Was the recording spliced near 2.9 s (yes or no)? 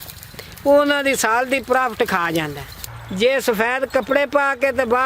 yes